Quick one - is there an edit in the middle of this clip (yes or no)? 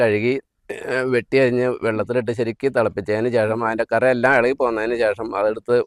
no